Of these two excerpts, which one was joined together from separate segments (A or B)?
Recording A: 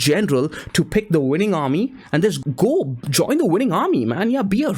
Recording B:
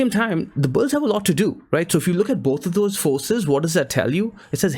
A